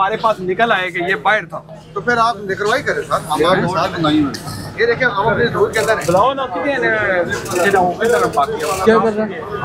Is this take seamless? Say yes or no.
yes